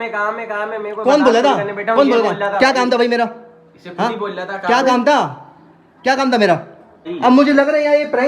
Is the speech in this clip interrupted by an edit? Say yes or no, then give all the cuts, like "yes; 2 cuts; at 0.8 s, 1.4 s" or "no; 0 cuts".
yes; 1 cut; at 7.0 s